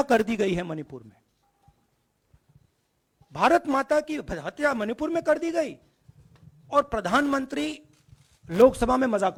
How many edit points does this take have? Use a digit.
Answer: 0